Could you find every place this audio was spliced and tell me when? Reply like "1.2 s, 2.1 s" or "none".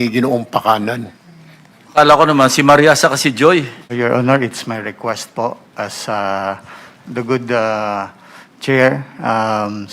3.8 s